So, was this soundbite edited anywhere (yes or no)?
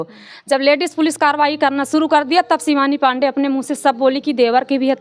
no